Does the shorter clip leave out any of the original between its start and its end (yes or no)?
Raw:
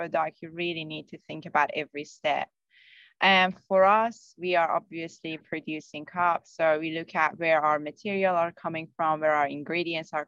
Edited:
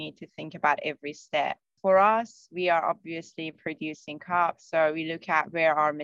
yes